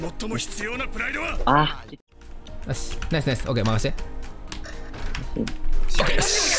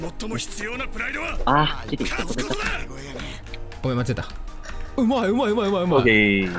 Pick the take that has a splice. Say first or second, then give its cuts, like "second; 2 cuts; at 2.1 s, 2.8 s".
first; 1 cut; at 1.8 s